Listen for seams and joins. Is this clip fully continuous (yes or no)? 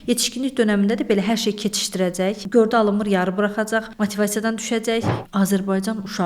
no